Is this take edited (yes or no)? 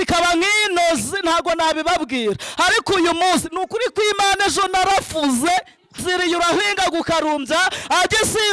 yes